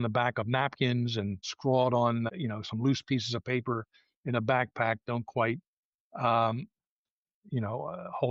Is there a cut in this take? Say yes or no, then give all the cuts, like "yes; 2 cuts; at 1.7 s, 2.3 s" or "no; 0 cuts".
yes; 2 cuts; at 1.5 s, 2.3 s